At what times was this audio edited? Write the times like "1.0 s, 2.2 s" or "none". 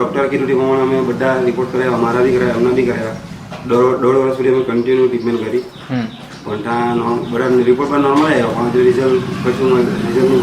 none